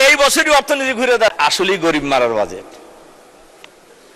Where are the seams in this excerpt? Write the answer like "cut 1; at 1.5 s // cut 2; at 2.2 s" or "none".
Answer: cut 1; at 1.3 s